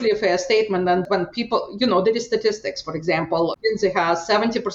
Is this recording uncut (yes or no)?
no